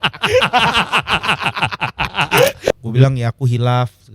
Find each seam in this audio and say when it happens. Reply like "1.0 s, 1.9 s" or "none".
2.7 s